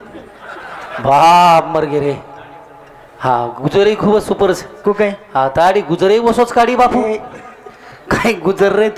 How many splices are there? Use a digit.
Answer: 0